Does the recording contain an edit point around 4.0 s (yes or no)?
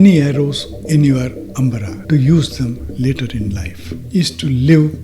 yes